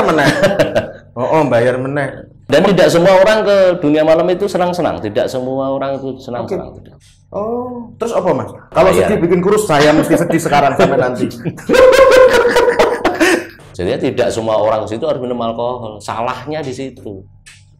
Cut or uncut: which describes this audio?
cut